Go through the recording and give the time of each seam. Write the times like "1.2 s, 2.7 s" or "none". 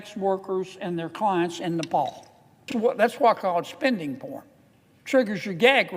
2.7 s